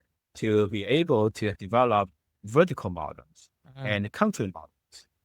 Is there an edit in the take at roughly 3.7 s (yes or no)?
no